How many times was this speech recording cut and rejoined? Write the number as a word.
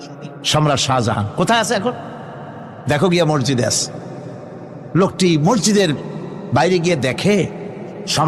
zero